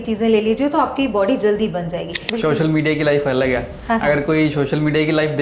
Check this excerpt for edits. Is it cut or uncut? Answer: cut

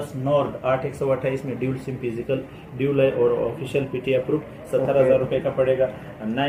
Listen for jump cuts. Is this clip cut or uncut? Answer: uncut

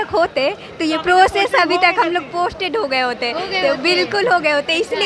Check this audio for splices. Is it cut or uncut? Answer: uncut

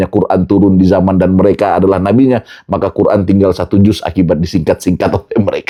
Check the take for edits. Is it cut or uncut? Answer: uncut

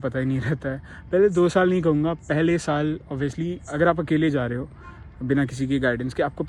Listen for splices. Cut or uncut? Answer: uncut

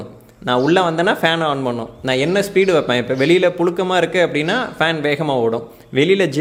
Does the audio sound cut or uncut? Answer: uncut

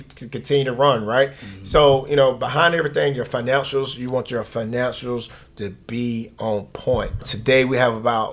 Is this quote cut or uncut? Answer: cut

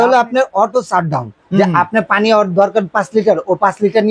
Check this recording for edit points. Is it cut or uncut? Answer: uncut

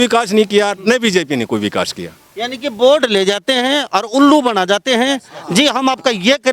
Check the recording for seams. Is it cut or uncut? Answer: uncut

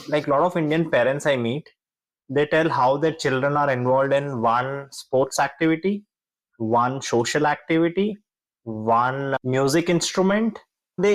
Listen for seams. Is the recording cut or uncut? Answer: uncut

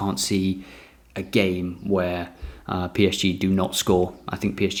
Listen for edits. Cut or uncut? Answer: uncut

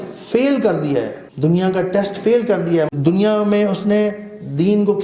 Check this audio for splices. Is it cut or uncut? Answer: cut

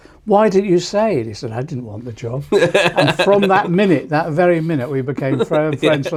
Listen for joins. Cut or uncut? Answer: uncut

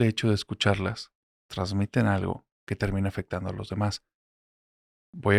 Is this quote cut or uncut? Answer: uncut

